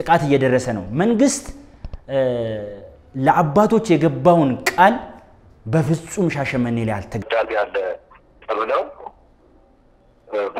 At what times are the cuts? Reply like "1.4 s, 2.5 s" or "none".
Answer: 7.2 s

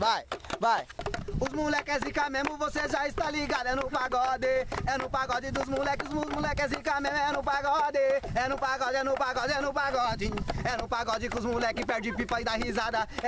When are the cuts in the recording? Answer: 1.0 s

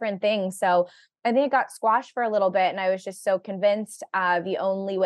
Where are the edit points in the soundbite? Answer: none

